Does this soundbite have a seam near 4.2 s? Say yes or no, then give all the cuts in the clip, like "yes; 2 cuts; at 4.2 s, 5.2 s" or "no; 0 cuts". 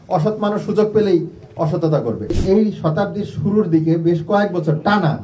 no; 1 cut; at 2.4 s